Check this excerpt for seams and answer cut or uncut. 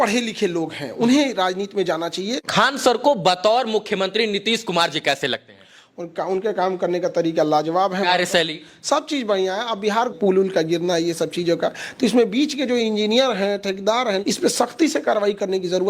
cut